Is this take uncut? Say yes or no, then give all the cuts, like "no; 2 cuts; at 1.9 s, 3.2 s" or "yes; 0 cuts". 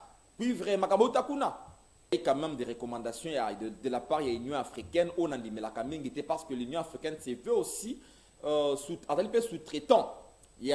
no; 1 cut; at 2.1 s